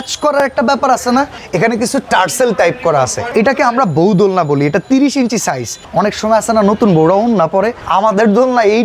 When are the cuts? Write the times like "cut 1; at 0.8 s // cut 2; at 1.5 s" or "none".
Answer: cut 1; at 1.4 s // cut 2; at 3.2 s // cut 3; at 5.8 s // cut 4; at 7.8 s